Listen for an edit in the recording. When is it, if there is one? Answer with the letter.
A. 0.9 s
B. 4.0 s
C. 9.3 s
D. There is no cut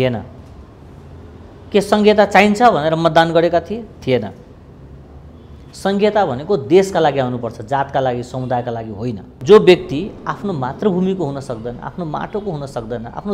C